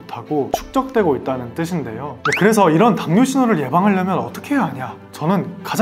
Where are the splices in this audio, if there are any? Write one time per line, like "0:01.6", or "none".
0:02.0